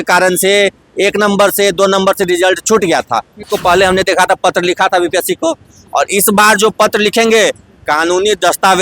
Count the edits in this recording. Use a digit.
1